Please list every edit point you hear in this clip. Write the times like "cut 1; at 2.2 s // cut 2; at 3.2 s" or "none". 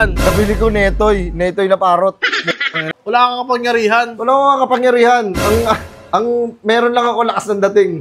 cut 1; at 2.8 s